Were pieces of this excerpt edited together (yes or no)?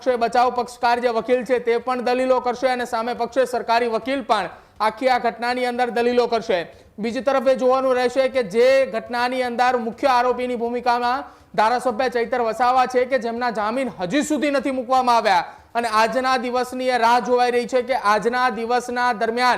no